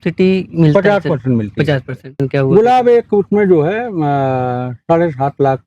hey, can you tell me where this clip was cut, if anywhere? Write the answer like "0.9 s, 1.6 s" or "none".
2.2 s